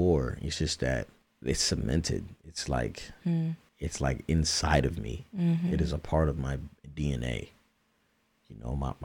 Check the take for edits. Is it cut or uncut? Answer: cut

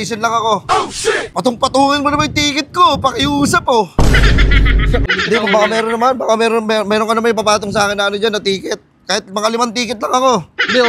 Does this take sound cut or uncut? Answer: cut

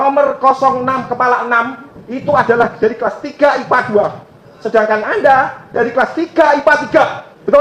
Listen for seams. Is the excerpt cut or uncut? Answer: uncut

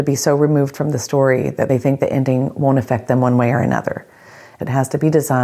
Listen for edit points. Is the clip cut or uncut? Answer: cut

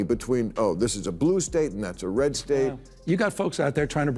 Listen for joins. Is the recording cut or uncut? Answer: cut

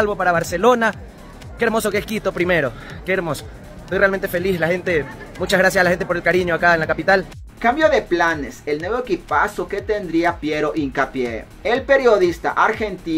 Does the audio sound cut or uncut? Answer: cut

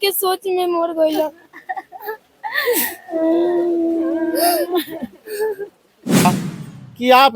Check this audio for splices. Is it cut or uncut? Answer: cut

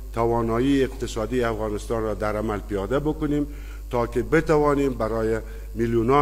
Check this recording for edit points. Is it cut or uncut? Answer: uncut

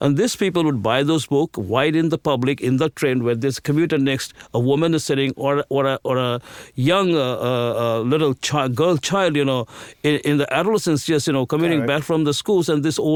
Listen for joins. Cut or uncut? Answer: uncut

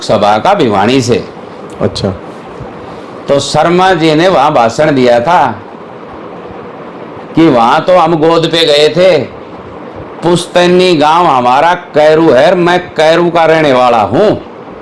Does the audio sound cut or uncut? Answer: uncut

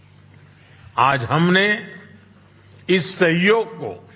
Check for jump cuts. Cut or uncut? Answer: uncut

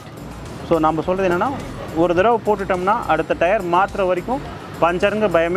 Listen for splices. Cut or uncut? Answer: uncut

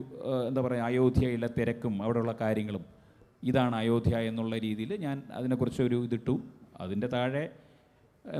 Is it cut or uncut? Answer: uncut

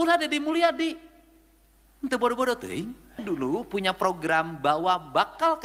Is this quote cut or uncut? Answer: cut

